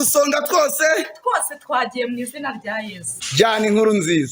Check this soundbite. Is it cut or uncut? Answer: uncut